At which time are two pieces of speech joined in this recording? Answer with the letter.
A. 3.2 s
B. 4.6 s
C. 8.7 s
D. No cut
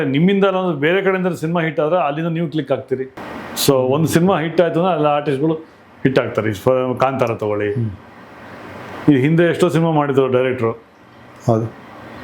A